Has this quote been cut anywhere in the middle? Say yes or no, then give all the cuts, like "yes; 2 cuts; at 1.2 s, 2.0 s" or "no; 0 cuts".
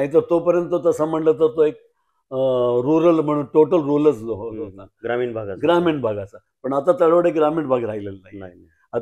no; 0 cuts